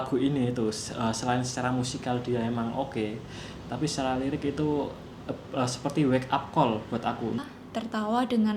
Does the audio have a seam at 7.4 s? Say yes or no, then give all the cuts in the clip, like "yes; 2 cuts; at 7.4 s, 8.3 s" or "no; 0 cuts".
yes; 1 cut; at 7.4 s